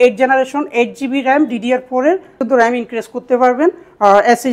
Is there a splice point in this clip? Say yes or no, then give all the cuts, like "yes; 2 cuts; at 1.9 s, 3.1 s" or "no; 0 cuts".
yes; 1 cut; at 2.4 s